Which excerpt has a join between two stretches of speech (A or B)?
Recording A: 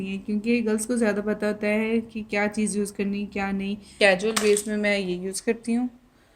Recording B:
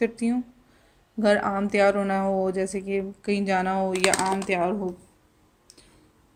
A